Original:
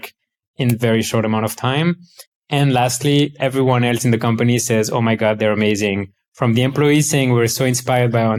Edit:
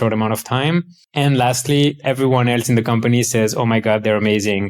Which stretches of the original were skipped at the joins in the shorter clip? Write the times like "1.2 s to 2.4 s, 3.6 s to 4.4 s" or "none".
2.1 s to 2.3 s

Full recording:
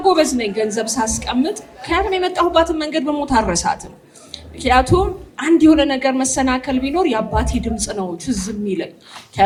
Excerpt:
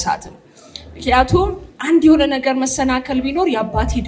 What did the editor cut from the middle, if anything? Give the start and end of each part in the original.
none

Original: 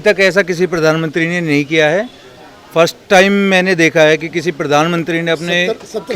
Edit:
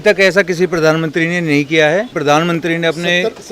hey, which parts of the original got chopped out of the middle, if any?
2.1 s to 4.6 s

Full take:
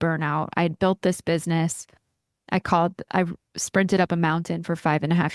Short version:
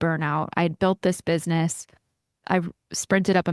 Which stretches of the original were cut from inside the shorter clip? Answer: 2.4 s to 3.0 s

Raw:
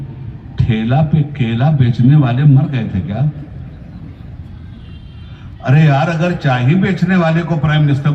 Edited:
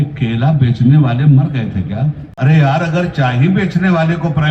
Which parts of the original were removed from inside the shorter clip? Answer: 3.4 s to 5.5 s

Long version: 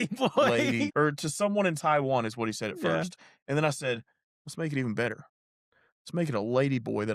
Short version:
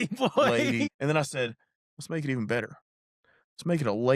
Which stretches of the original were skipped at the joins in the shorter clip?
0.9 s to 3.4 s

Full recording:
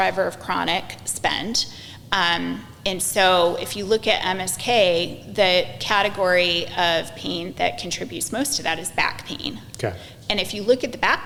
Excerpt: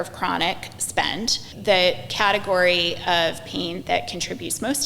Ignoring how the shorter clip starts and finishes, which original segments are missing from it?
1.8 s to 5.2 s

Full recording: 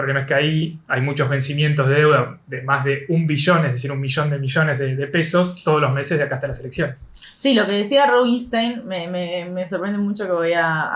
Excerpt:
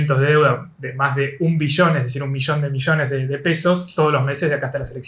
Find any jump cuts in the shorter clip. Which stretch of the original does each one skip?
none

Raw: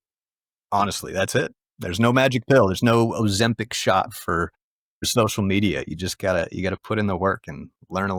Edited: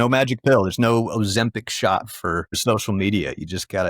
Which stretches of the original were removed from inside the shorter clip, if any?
4.5 s to 5.0 s

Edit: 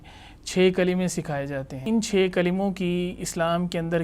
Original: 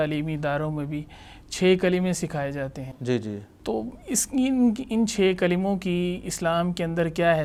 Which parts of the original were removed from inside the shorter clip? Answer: 2.8 s to 4.8 s

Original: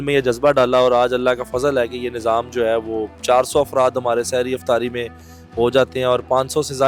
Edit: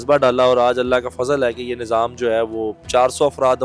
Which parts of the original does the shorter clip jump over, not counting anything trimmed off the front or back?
none

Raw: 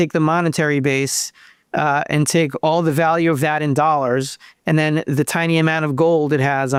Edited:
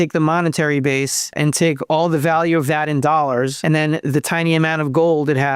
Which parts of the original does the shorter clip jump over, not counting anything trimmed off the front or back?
1.3 s to 2.1 s, 4.3 s to 4.6 s

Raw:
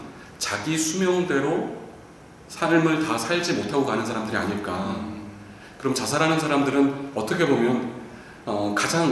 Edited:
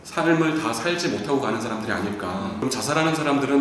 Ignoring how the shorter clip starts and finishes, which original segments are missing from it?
5.1 s to 5.9 s

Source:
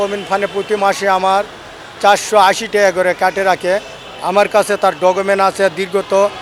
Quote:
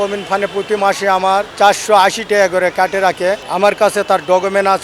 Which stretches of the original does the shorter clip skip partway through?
1.5 s to 1.9 s, 3.9 s to 4.2 s

